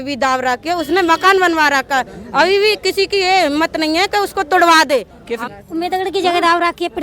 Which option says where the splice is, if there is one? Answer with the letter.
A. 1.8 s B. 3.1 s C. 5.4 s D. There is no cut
C